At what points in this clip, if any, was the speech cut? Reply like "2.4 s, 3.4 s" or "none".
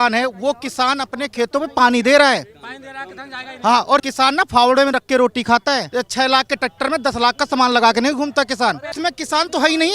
4.1 s, 5.9 s, 8.9 s

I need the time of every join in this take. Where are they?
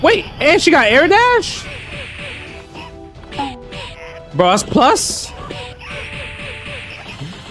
1.6 s, 5.3 s

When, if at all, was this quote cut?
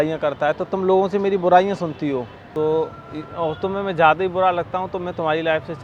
2.4 s

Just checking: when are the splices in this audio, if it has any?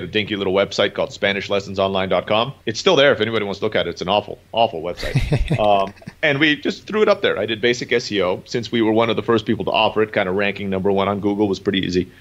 2.6 s, 6.0 s

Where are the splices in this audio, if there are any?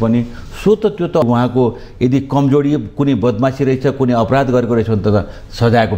1.2 s

